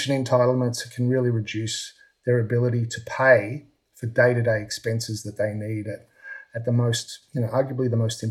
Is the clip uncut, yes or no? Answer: yes